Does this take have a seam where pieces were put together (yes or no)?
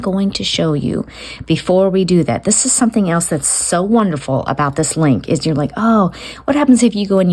no